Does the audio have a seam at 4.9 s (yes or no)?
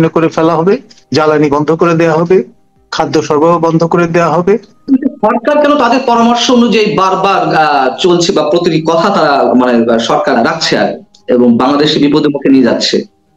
yes